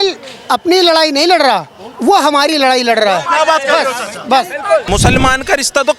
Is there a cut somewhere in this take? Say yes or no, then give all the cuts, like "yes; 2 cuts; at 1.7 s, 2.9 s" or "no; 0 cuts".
yes; 1 cut; at 4.8 s